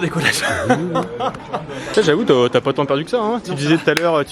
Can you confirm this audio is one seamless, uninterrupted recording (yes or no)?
no